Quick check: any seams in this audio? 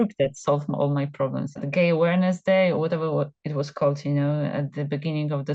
yes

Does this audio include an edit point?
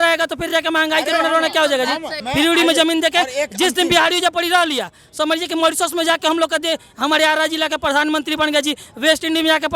yes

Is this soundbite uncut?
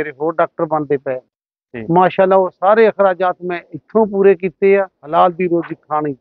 no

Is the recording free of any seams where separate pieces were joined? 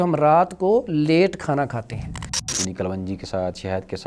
no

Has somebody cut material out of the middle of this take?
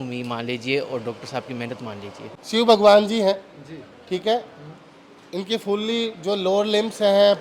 no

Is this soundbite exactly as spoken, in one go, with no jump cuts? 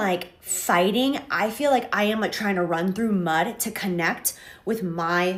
yes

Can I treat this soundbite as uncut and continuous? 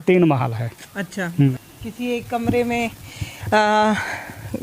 no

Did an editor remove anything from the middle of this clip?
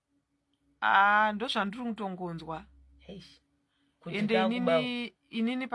no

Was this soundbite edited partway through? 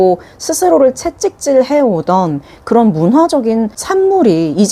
no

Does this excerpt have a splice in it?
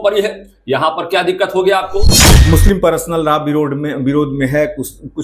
yes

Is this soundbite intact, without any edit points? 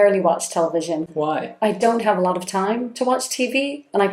no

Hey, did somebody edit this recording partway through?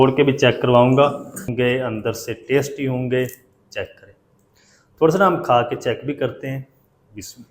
yes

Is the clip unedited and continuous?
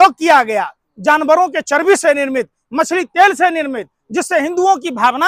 yes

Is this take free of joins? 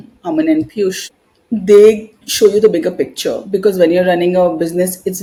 yes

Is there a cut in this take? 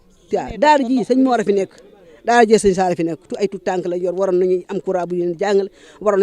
no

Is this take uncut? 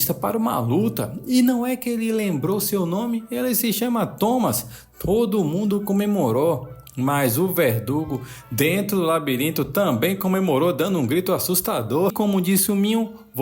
no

